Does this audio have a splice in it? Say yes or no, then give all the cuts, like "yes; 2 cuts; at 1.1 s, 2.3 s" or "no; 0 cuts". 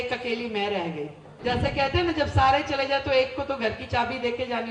yes; 1 cut; at 1.2 s